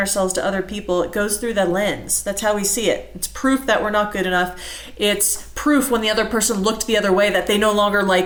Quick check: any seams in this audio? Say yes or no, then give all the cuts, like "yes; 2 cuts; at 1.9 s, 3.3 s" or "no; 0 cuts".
no; 0 cuts